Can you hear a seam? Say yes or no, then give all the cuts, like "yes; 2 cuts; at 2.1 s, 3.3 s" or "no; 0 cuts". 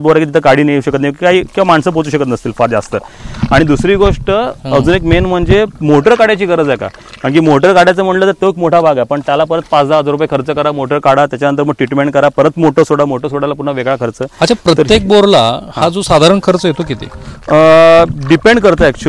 no; 0 cuts